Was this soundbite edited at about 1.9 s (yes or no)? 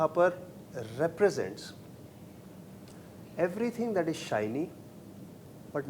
no